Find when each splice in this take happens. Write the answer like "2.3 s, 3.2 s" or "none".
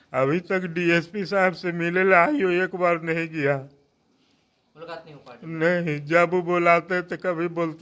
none